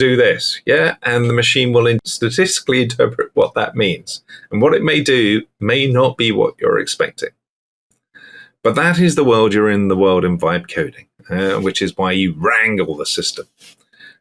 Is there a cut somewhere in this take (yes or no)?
yes